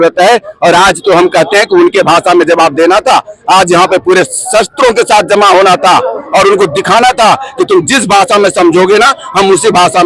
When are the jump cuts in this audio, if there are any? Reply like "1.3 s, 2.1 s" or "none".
none